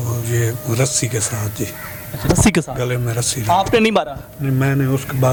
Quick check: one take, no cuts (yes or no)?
yes